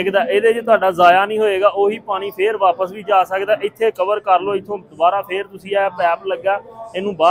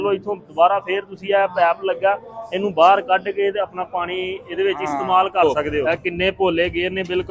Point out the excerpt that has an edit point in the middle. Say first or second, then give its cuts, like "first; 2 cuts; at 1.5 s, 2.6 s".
second; 1 cut; at 5.7 s